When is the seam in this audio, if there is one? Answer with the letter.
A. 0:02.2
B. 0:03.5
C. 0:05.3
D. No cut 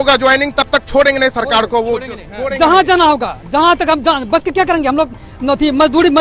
D